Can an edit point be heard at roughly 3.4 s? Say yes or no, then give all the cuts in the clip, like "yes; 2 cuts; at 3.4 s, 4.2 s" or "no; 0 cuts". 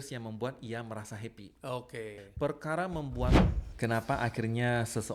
yes; 2 cuts; at 2.1 s, 3.4 s